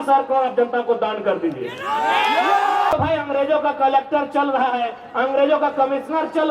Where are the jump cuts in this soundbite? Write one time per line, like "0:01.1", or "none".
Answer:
0:02.9